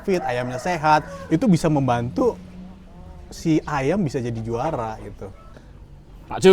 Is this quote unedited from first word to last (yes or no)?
no